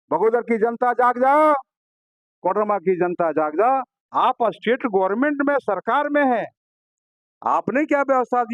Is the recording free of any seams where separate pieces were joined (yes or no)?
no